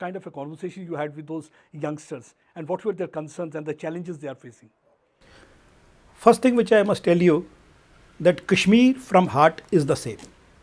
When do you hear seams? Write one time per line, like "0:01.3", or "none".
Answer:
none